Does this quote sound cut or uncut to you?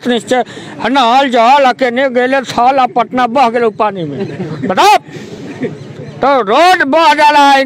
uncut